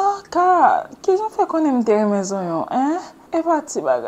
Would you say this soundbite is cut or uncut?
cut